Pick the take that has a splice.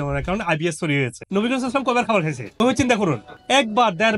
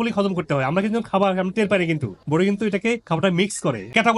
first; 1 cut; at 1.2 s

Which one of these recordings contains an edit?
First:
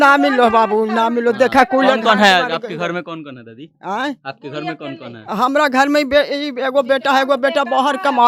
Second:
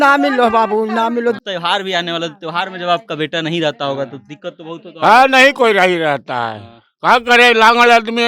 second; 1 cut; at 1.4 s

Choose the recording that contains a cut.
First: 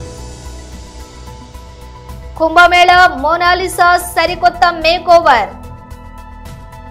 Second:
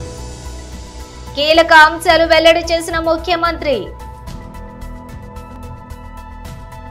second; 2 cuts; at 1.2 s, 5.6 s

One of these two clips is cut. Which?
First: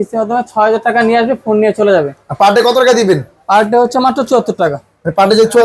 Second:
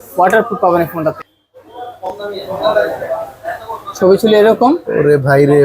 second; 1 cut; at 1.2 s

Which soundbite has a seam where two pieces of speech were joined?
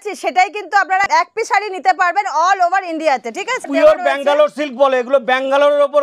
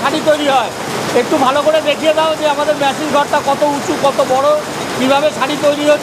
first; 2 cuts; at 1.1 s, 3.7 s

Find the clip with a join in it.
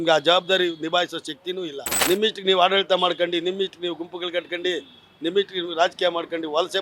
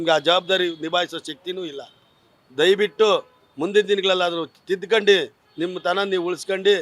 first; 1 cut; at 1.9 s

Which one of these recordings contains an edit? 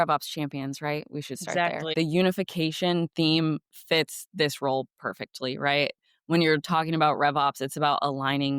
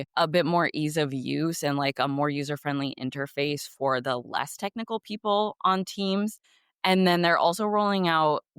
first; 1 cut; at 1.9 s

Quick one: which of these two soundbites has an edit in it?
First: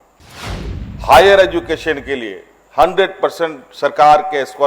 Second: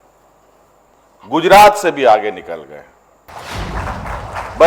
second; 1 cut; at 3.3 s

